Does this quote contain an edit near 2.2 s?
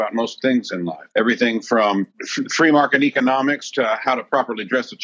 yes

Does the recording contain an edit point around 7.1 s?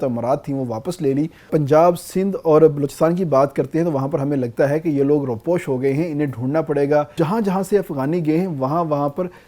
yes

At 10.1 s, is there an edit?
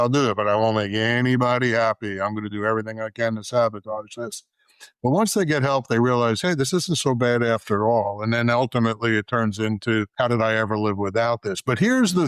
yes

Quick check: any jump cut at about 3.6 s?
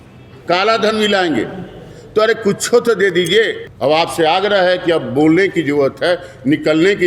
yes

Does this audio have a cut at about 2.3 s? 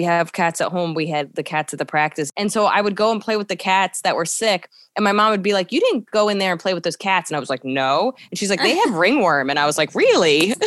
yes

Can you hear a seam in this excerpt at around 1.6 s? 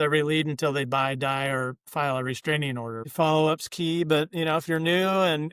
no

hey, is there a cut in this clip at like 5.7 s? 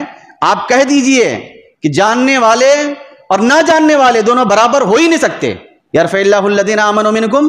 yes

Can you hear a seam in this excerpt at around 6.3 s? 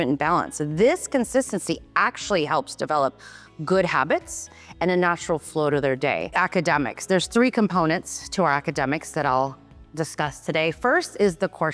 yes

